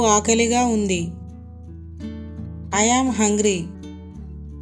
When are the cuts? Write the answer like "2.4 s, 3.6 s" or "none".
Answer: 1.1 s, 2.7 s, 3.8 s